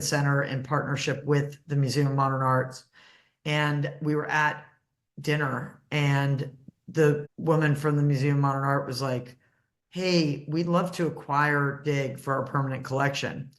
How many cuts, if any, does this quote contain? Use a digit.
1